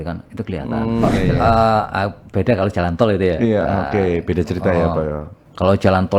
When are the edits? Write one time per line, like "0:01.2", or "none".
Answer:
0:01.4